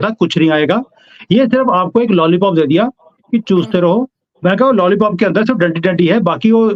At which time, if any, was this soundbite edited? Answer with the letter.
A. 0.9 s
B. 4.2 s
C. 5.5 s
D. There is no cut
D